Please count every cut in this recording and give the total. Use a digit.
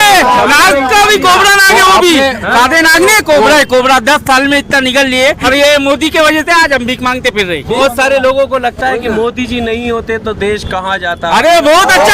2